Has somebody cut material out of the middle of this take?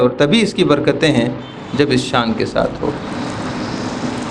no; 0 cuts

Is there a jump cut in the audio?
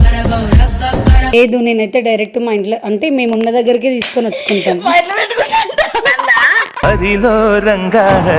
yes; 1 cut; at 1.3 s

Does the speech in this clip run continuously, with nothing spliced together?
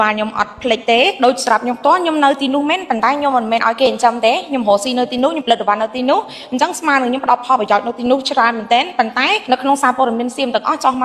no; 2 cuts; at 1.2 s, 9.4 s

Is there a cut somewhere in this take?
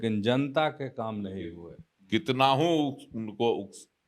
no; 0 cuts

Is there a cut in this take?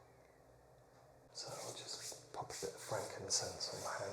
yes; 1 cut; at 1.3 s

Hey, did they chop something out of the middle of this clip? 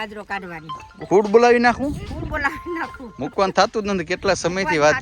no; 0 cuts

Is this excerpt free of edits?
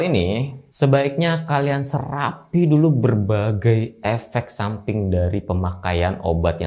yes; 0 cuts

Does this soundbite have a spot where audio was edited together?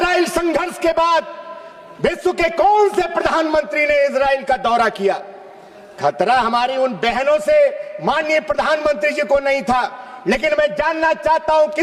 no; 0 cuts

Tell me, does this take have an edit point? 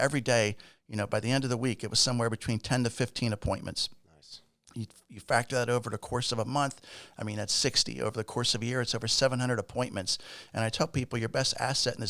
no; 0 cuts

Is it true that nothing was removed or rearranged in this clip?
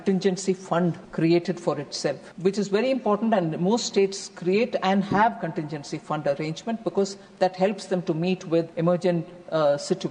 no; 3 cuts; at 1.0 s, 2.3 s, 8.7 s

